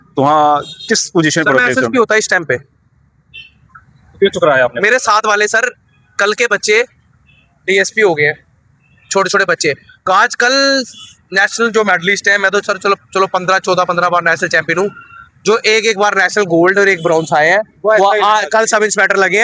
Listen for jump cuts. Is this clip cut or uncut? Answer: uncut